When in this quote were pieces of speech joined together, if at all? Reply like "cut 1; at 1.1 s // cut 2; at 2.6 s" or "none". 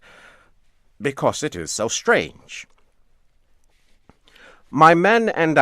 cut 1; at 4.6 s